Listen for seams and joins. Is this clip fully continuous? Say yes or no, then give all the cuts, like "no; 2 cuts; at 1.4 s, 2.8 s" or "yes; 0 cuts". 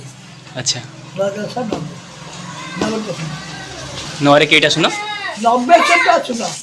yes; 0 cuts